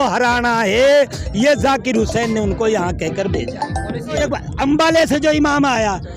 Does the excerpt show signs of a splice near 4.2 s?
yes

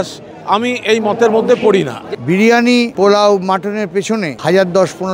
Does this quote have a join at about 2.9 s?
yes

